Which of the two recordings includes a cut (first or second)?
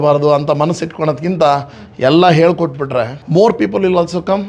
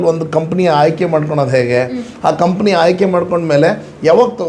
first